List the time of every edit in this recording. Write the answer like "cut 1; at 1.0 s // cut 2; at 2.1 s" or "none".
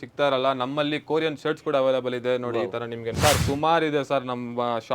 cut 1; at 3.2 s